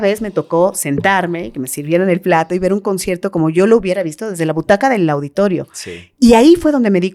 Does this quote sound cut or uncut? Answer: uncut